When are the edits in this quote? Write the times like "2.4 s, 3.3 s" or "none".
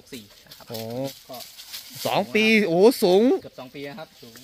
1.1 s